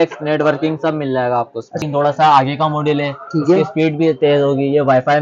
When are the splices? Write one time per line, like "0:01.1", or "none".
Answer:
0:01.8